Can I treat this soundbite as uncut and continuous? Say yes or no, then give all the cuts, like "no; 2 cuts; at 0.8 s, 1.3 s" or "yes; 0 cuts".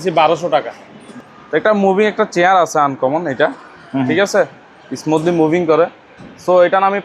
no; 1 cut; at 1.1 s